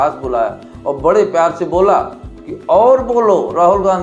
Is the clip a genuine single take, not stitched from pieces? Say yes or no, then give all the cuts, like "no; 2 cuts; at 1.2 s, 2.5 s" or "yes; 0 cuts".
no; 1 cut; at 1.7 s